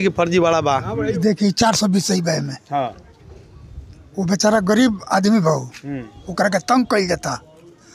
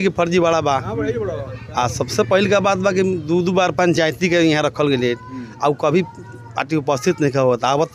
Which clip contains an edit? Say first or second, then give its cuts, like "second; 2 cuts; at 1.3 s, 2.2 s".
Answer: first; 1 cut; at 1.2 s